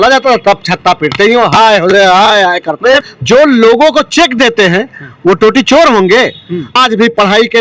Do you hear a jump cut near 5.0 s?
no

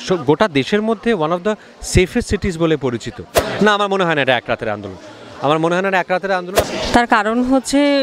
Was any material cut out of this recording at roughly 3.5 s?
yes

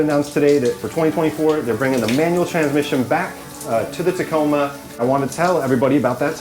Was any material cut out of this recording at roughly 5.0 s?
yes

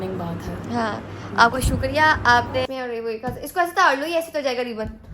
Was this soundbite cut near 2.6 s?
yes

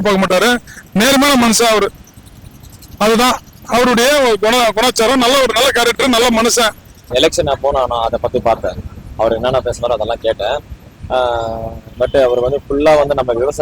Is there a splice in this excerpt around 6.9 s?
yes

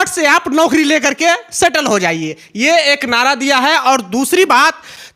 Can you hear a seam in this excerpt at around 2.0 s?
no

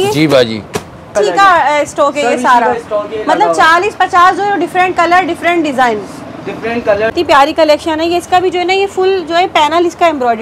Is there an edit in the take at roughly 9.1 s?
no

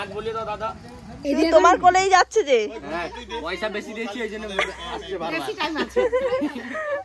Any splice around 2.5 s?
no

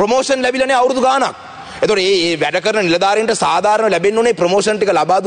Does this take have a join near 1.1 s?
no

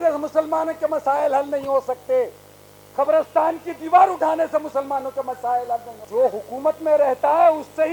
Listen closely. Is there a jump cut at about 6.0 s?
yes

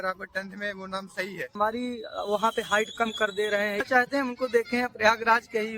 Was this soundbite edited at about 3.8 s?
yes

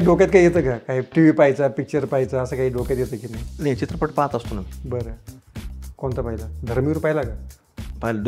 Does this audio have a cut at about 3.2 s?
no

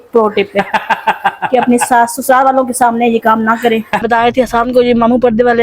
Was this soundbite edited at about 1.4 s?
no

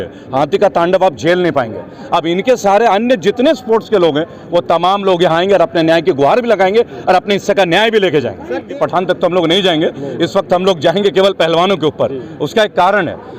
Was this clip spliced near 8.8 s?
yes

